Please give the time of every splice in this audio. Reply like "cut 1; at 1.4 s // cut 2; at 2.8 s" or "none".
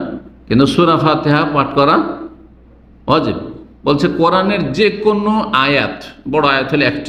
none